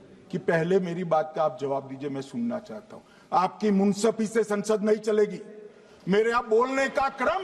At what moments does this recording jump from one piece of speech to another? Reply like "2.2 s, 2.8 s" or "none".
none